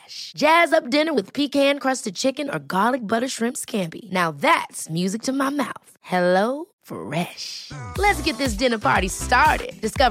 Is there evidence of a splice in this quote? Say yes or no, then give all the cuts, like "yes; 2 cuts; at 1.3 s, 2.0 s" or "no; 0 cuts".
no; 0 cuts